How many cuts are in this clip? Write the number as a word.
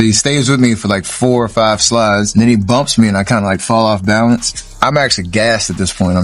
two